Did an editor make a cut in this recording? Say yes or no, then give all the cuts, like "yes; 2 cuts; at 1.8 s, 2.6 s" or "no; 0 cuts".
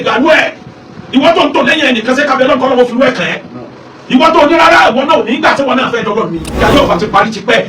yes; 1 cut; at 6.5 s